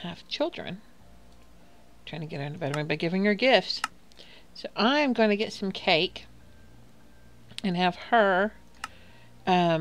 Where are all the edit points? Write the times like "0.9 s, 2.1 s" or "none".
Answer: 5.1 s

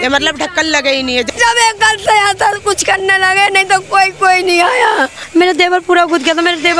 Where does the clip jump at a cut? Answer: 1.3 s, 5.2 s

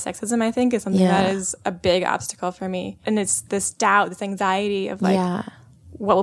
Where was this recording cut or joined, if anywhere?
3.0 s

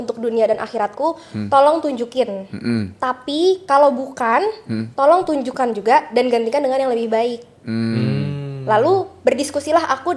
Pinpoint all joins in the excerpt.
none

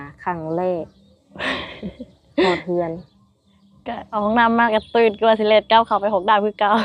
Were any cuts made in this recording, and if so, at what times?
4.1 s

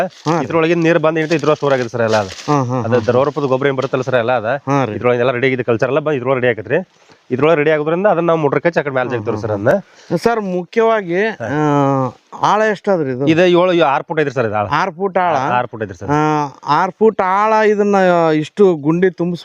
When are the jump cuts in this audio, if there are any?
none

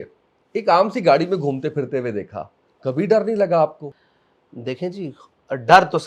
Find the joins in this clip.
3.9 s

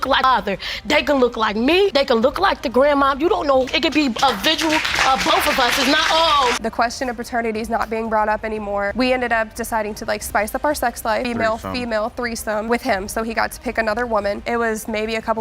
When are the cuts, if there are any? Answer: 3.6 s, 6.6 s, 11.2 s, 14.4 s

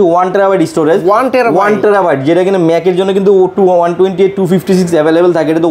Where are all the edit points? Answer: none

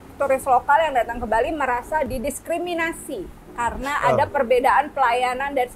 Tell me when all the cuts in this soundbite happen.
3.4 s

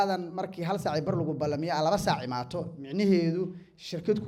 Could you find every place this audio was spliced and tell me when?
none

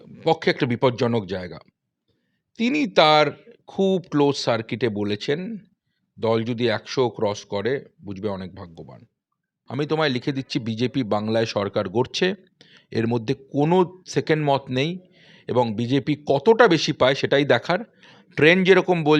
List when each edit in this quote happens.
9.5 s

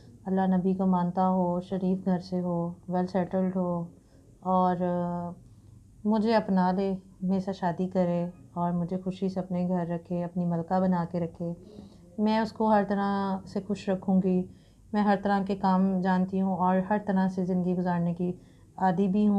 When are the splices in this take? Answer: none

